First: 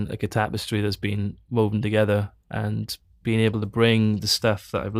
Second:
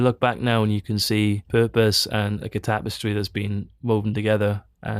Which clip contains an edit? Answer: second; 1 cut; at 1.4 s

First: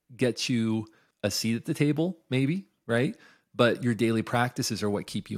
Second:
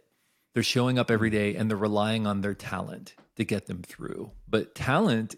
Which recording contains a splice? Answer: first; 1 cut; at 1.0 s

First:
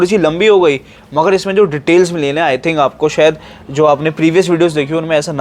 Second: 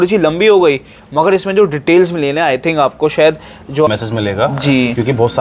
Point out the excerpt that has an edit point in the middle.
second; 1 cut; at 3.9 s

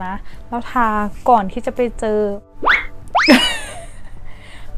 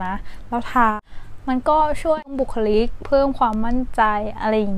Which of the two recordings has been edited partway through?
second; 1 cut; at 0.9 s

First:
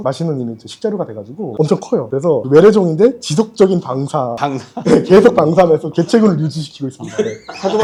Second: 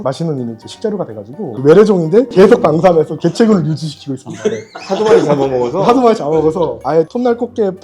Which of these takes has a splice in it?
second; 3 cuts; at 1.5 s, 2.3 s, 6.8 s

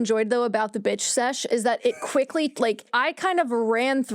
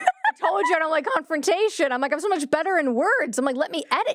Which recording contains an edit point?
first; 1 cut; at 2.9 s

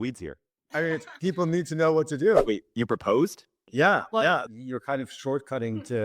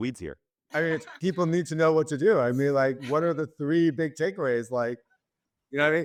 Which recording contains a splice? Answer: first; 2 cuts; at 2.4 s, 4.5 s

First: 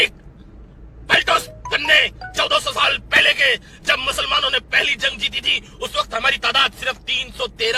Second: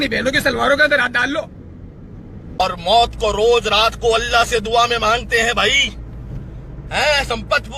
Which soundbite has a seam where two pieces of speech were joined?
second; 1 cut; at 2.6 s

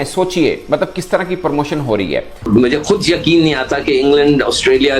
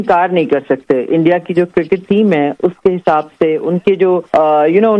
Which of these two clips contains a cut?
first; 1 cut; at 2.4 s

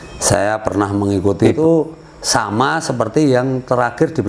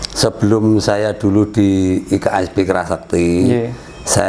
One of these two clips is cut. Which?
first; 1 cut; at 1.4 s

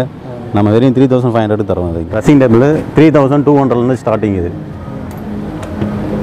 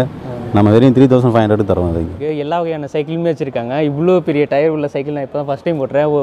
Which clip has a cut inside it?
second; 1 cut; at 2.1 s

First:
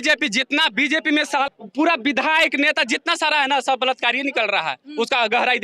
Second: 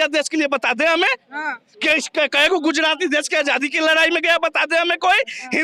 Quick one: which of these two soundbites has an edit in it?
first; 1 cut; at 1.4 s

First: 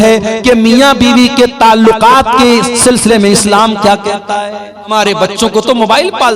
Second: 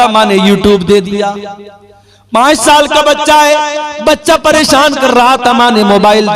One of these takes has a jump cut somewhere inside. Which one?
first; 1 cut; at 4.9 s

